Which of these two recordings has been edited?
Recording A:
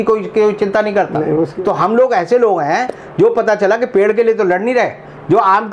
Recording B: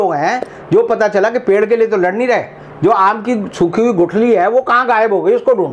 A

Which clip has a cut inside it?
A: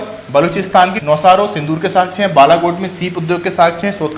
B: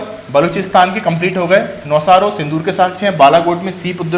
A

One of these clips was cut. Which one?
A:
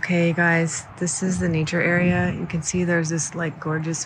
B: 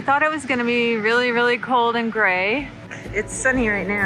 B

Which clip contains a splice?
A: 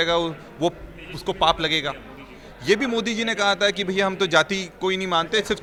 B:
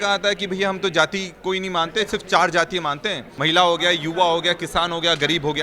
B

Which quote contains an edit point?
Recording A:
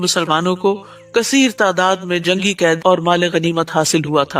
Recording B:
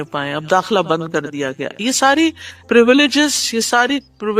A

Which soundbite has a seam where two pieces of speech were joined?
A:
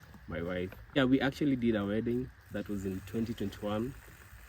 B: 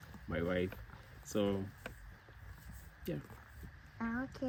A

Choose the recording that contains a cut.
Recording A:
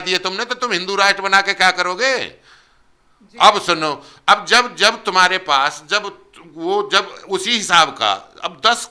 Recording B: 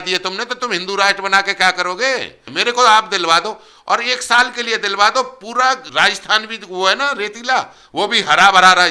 B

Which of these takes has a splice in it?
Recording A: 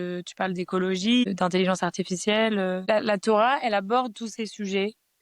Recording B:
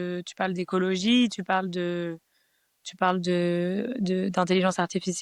A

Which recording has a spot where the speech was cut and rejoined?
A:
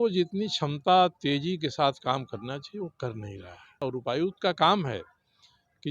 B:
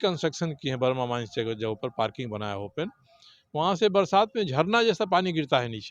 A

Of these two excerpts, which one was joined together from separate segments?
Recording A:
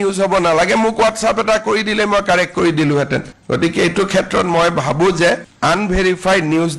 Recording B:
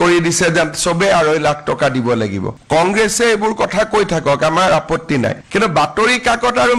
B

